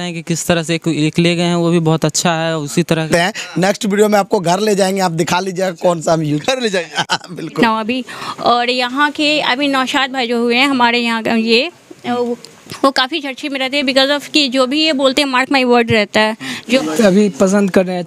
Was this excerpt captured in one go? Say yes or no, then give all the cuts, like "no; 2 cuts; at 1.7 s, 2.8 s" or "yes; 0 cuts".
no; 3 cuts; at 3.0 s, 7.6 s, 16.8 s